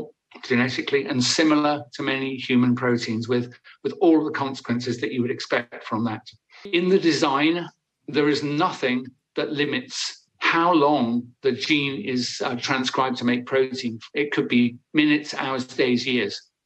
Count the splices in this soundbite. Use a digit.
1